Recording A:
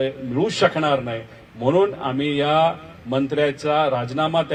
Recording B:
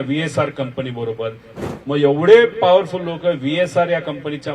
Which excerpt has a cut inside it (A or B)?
B